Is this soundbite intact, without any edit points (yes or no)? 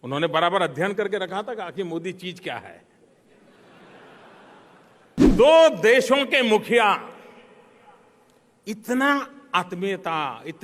no